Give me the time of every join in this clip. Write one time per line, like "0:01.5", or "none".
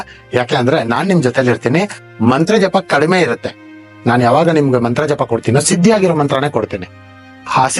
none